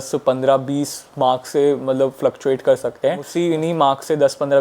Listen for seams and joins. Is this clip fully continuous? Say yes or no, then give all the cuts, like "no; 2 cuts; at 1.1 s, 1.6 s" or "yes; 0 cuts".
yes; 0 cuts